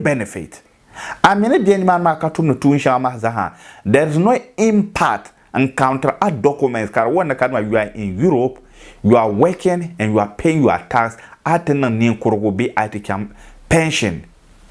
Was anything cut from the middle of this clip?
no; 0 cuts

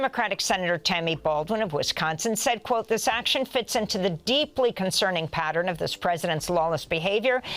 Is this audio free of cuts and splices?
yes; 0 cuts

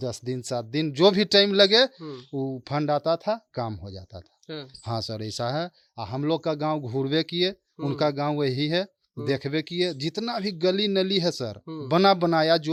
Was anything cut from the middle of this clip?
no; 0 cuts

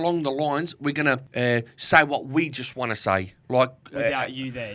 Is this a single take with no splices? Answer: no; 2 cuts; at 1.3 s, 3.4 s

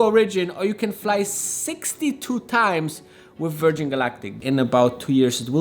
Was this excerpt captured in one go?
no; 1 cut; at 4.4 s

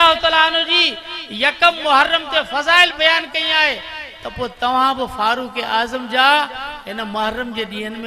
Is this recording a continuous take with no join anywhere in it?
yes; 0 cuts

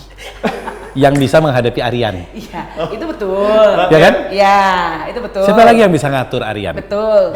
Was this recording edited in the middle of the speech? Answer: no; 0 cuts

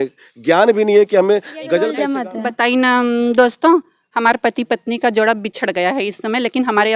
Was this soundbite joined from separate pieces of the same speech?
yes; 1 cut; at 2.0 s

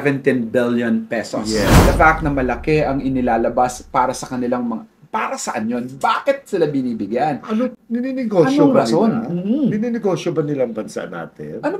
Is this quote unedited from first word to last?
no; 1 cut; at 1.8 s

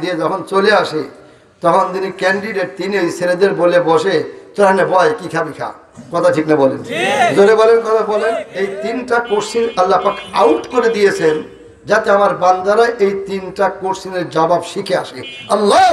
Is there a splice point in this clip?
yes; 1 cut; at 8.5 s

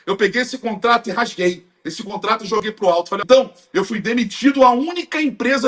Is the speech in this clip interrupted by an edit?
yes; 1 cut; at 3.2 s

